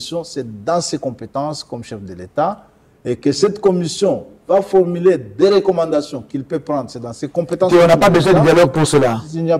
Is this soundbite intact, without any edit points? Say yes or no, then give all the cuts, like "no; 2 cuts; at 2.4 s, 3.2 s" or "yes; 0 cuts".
yes; 0 cuts